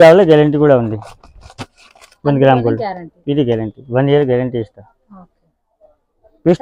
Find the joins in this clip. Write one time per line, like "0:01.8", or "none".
none